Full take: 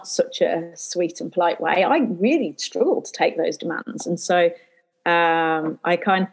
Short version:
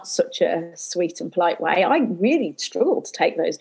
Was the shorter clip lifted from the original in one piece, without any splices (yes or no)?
yes